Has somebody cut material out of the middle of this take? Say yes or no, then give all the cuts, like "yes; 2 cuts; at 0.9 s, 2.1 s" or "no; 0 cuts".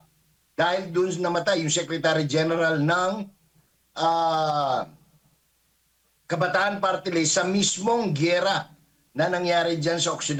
no; 0 cuts